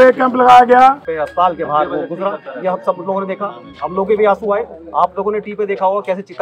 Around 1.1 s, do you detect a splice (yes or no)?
yes